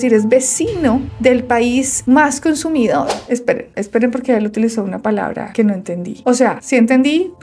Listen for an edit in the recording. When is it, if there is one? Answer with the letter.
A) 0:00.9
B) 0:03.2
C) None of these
B